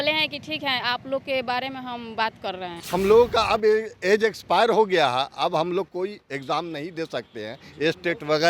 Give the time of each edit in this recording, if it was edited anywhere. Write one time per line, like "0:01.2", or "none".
0:02.8